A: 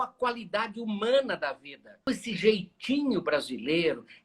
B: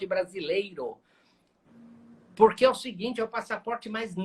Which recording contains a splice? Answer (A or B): A